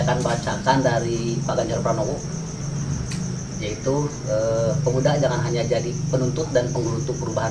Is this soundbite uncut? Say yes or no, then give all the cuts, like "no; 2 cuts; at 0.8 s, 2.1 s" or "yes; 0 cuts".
yes; 0 cuts